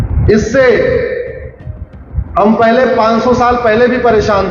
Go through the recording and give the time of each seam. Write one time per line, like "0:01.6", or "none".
none